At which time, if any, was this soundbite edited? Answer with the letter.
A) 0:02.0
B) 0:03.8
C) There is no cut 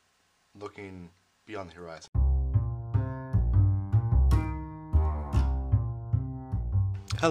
A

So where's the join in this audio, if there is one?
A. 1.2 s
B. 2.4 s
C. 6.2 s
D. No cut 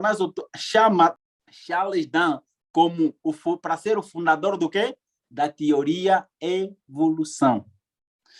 A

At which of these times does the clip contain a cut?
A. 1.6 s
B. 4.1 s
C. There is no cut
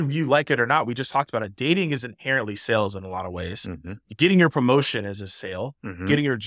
B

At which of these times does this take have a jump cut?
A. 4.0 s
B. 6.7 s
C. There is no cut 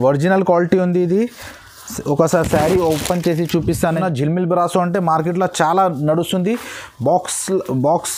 A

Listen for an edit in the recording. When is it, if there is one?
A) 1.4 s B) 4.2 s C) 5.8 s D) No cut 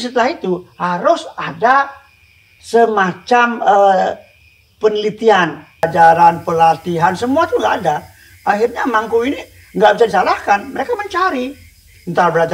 C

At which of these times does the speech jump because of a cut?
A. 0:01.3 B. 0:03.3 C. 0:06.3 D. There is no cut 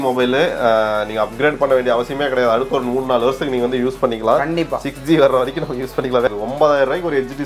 C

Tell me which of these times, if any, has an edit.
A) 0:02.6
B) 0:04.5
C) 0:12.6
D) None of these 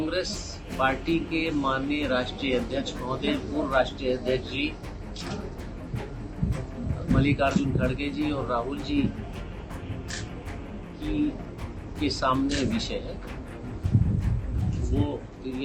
D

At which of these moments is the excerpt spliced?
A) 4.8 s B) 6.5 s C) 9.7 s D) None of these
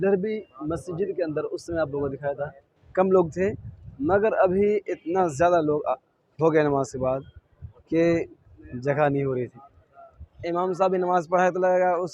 C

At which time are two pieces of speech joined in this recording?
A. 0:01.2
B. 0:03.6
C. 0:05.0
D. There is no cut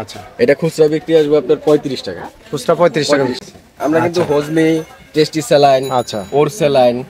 B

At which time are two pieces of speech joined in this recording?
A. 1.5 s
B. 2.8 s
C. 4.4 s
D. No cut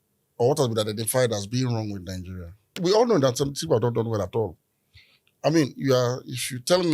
B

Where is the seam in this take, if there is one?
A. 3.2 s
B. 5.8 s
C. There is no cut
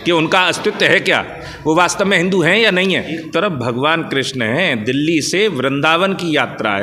A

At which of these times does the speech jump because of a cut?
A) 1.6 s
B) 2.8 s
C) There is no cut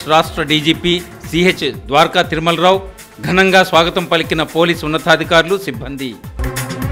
C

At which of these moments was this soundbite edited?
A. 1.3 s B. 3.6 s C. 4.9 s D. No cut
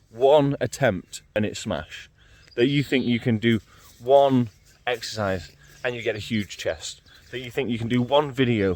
A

